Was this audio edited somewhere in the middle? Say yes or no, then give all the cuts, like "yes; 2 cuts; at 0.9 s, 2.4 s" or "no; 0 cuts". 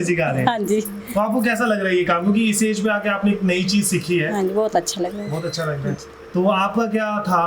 no; 0 cuts